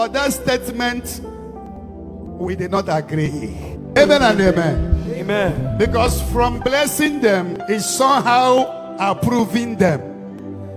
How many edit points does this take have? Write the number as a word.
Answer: one